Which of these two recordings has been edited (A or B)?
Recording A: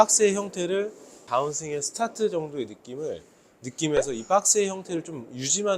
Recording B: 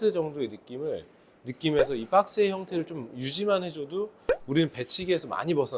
A